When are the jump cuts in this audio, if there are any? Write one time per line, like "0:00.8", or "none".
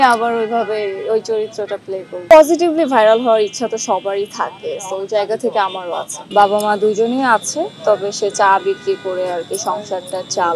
0:02.1
0:06.2

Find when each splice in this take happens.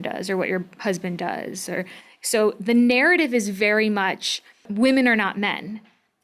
0:04.7

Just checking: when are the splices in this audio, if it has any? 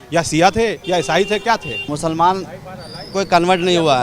0:01.9

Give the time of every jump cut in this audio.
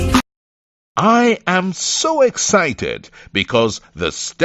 0:01.2

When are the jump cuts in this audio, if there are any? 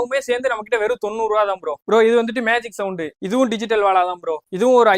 none

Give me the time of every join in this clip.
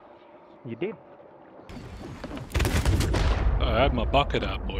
0:01.7

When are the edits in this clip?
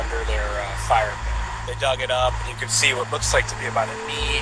none

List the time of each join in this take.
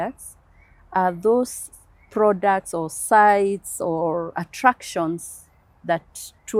none

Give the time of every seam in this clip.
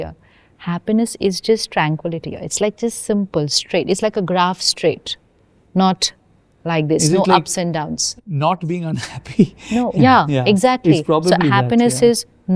none

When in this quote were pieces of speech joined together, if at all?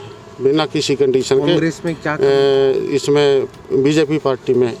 none

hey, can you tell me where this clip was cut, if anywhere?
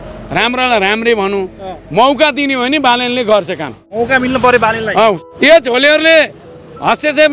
0:03.9
0:05.2

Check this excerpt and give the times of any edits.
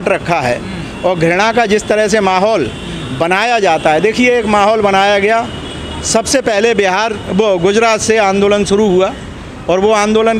none

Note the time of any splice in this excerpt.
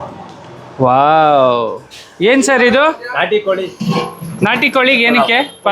none

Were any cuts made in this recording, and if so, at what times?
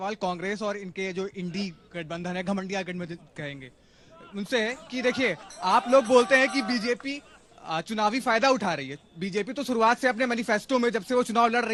none

